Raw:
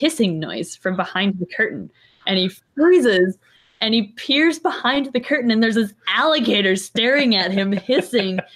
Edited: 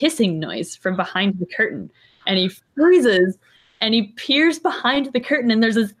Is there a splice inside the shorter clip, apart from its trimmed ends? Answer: no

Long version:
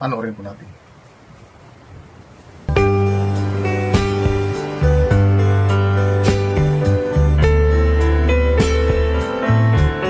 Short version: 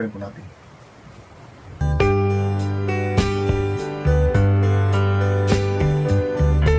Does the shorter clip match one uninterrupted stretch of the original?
no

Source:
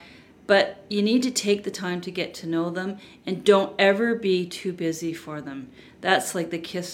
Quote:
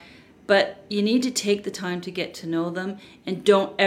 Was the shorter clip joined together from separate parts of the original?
no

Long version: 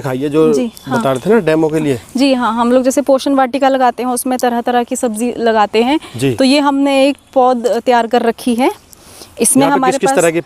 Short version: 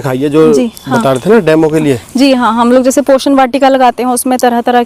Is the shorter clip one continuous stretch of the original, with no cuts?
yes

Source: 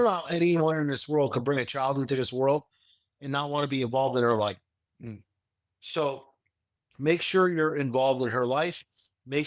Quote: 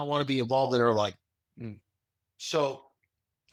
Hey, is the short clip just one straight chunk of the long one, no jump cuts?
yes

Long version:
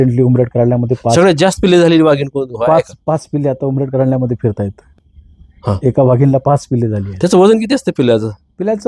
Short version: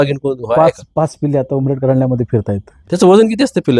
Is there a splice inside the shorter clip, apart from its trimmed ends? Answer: yes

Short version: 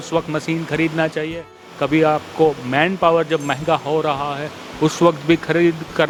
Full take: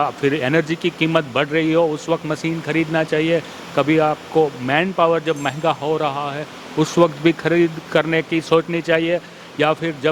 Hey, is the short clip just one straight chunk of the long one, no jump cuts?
yes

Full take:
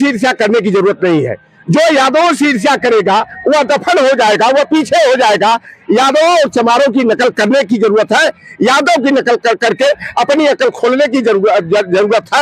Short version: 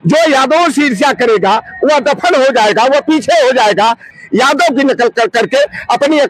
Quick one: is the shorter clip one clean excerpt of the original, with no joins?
no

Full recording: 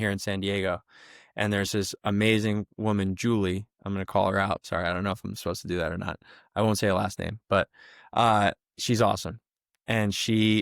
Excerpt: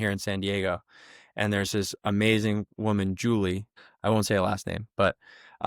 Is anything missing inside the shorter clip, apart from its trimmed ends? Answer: yes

